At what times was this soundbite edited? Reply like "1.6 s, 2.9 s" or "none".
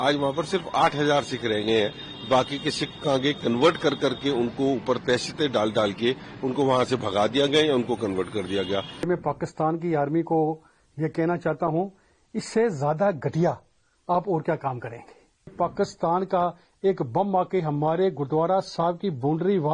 9.1 s, 15.5 s